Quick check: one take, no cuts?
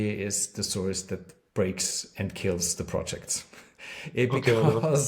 yes; 0 cuts

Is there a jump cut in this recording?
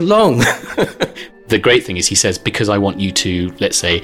yes; 1 cut; at 1.4 s

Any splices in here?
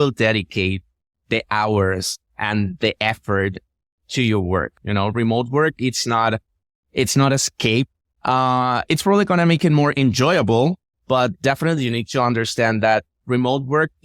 yes; 2 cuts; at 4.8 s, 8.1 s

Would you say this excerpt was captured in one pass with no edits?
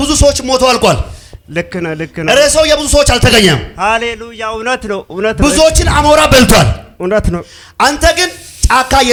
yes; 0 cuts

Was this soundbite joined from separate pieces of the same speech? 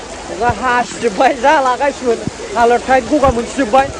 no; 0 cuts

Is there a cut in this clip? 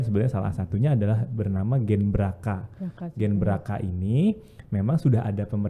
no; 0 cuts

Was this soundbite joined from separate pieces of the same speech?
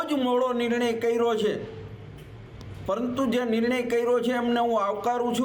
no; 0 cuts

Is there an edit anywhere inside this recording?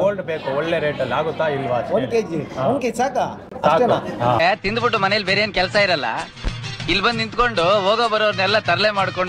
no; 0 cuts

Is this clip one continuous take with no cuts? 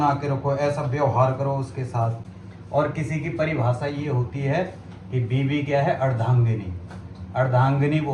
yes; 0 cuts

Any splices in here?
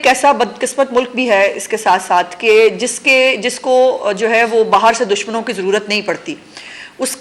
no; 0 cuts

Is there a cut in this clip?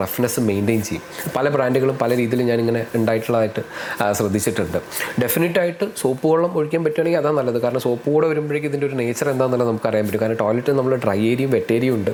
no; 0 cuts

